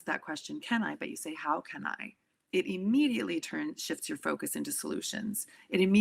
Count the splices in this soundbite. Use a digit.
0